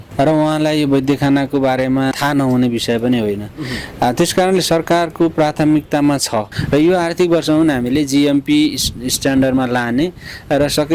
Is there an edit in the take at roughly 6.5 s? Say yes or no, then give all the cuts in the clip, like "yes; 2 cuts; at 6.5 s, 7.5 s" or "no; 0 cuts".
no; 0 cuts